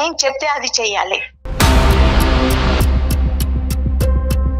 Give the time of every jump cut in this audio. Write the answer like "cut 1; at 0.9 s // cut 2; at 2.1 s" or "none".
cut 1; at 1.4 s